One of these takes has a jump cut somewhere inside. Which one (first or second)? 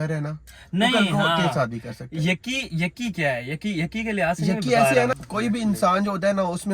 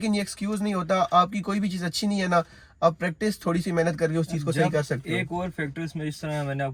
first